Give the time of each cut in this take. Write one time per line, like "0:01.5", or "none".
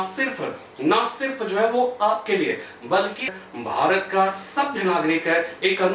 0:03.3